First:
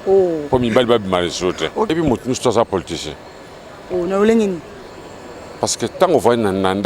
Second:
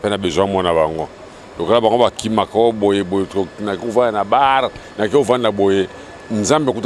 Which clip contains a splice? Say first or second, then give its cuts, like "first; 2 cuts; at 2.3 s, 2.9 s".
first; 1 cut; at 1.9 s